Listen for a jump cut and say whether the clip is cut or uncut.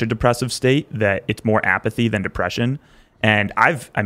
uncut